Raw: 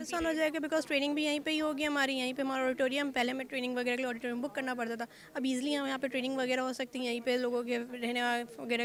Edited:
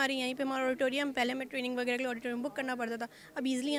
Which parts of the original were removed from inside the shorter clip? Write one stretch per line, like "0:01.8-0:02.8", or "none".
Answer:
none